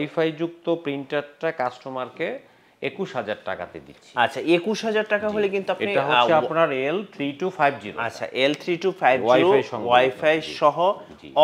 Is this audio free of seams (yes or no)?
yes